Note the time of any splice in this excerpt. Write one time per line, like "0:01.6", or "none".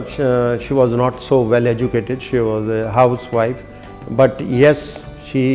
none